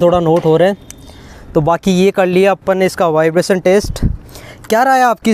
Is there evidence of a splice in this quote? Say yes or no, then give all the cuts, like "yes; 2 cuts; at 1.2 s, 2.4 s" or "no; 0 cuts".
no; 0 cuts